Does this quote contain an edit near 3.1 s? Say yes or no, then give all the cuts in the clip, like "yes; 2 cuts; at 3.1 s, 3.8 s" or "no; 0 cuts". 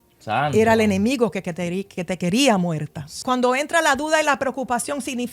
yes; 1 cut; at 3.1 s